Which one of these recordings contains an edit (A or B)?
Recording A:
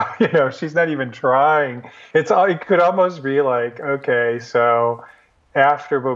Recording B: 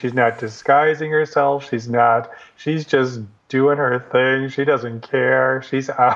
A